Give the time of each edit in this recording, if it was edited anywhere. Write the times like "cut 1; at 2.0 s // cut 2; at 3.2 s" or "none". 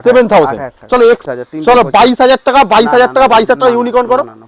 cut 1; at 1.2 s